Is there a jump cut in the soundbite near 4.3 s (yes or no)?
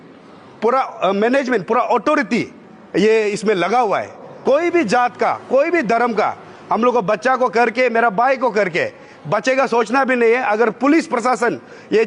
yes